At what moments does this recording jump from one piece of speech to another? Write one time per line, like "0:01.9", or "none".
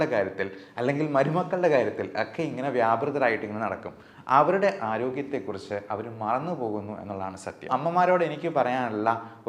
0:07.7